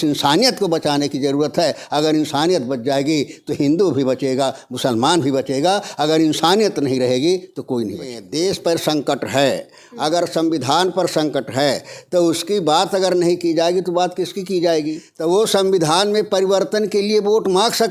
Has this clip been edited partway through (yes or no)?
yes